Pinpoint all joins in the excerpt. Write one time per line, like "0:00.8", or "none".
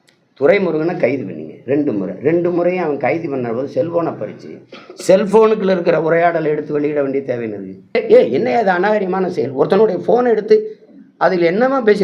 0:08.0